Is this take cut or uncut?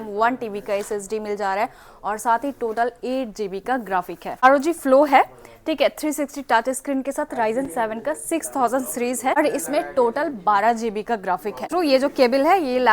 cut